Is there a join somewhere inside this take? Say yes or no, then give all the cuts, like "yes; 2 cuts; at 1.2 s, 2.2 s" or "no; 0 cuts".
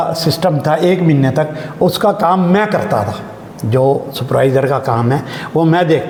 no; 0 cuts